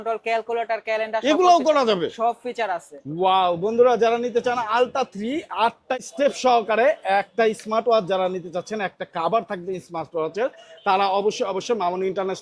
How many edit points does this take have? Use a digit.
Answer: 0